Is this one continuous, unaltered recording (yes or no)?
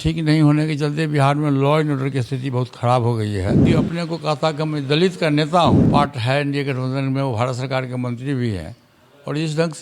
no